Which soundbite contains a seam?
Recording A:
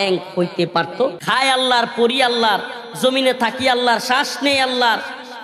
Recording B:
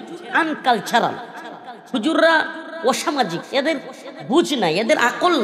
A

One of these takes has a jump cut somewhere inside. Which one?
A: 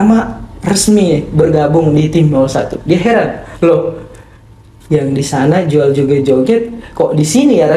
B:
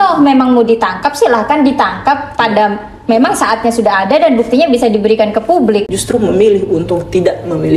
B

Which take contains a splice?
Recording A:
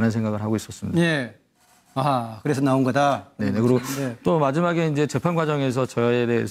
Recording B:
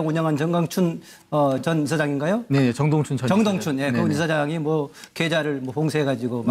B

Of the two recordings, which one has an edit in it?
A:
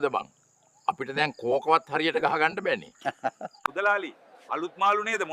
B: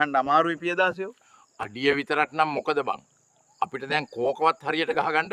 A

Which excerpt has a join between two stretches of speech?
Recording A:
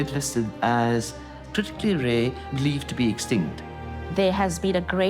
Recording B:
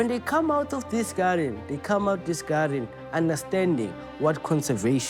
A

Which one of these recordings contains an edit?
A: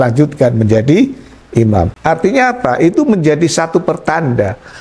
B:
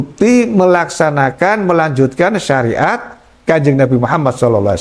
A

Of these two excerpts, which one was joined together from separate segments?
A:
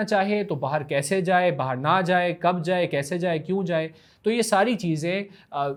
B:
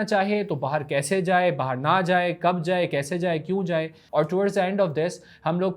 B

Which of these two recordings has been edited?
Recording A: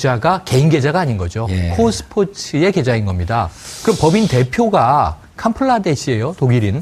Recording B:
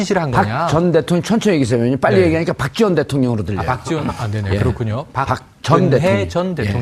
B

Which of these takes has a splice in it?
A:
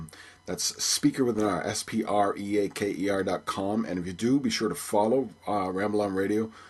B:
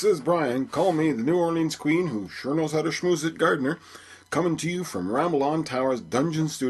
A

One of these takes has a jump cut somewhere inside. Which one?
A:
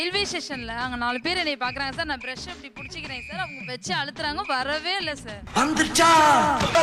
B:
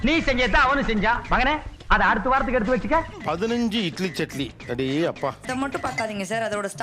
B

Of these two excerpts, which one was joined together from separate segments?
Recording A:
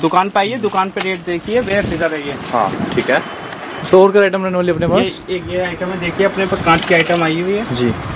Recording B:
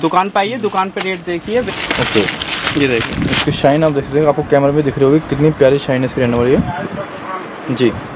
B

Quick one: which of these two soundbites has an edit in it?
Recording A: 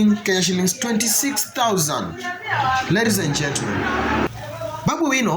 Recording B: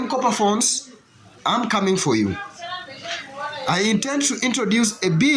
A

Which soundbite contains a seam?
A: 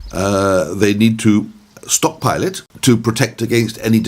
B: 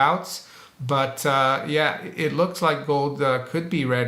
A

